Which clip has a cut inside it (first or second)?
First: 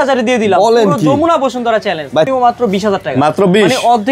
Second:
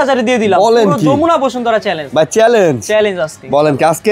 first